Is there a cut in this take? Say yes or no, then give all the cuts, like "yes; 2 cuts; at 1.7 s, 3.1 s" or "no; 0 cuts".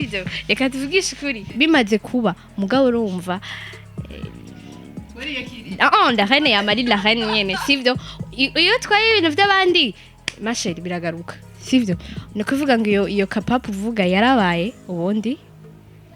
yes; 1 cut; at 1.5 s